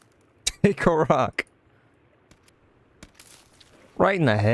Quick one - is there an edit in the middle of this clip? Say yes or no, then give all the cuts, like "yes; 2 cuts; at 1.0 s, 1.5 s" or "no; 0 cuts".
no; 0 cuts